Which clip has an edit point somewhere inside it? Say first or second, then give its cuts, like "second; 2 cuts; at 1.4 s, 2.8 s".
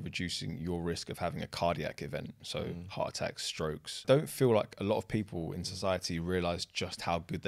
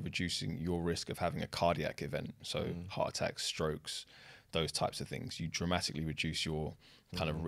first; 1 cut; at 4.0 s